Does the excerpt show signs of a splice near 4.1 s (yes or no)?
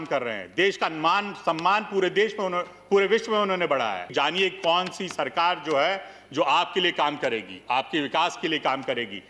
yes